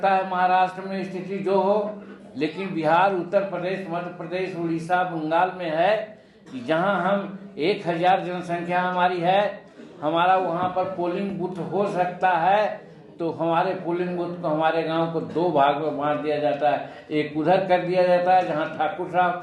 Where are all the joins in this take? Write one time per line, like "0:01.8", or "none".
none